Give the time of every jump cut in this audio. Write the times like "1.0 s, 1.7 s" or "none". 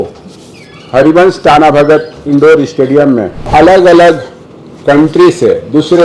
3.5 s